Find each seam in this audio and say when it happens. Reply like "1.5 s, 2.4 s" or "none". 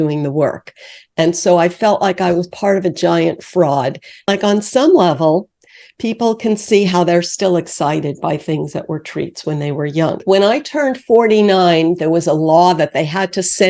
4.2 s, 10.2 s

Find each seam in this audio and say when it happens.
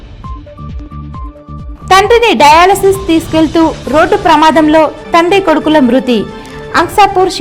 1.7 s

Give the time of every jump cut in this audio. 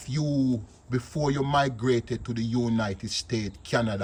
none

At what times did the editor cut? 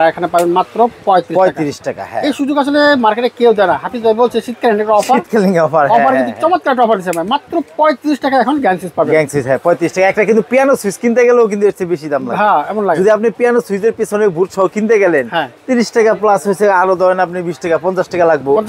none

